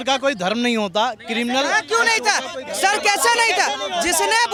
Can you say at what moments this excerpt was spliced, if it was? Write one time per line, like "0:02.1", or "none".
none